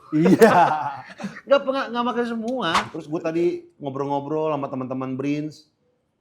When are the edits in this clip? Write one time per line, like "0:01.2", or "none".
0:02.9